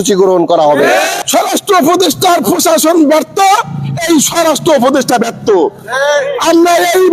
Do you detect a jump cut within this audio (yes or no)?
yes